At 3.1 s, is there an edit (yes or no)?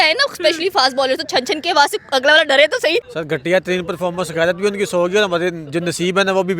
yes